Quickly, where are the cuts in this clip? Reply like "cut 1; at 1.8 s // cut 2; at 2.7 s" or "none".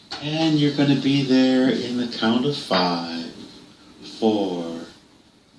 cut 1; at 1.5 s